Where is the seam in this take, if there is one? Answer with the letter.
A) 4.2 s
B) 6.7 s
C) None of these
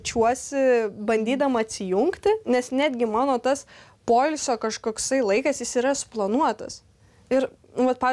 C